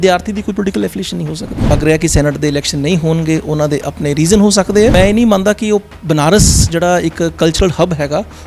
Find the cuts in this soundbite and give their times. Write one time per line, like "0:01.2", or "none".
0:01.7
0:04.9